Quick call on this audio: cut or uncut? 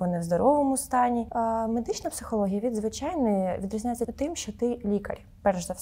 cut